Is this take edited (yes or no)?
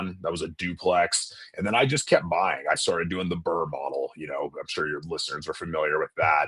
no